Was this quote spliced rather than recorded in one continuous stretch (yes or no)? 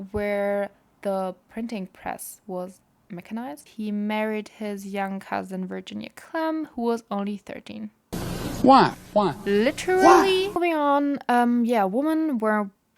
yes